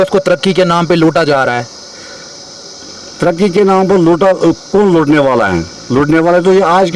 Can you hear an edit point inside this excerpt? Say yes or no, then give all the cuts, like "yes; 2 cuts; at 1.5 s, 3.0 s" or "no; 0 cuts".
no; 0 cuts